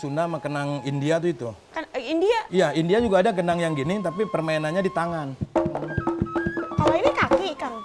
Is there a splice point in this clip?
no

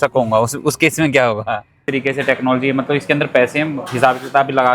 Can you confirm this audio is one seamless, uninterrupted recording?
no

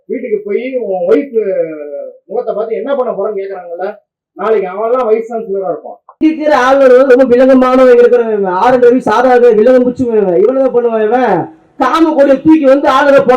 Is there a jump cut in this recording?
yes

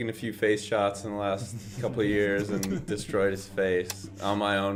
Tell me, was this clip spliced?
no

